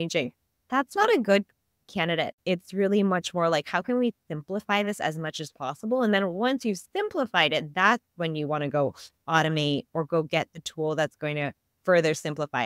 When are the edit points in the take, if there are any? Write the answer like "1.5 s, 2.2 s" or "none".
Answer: 2.3 s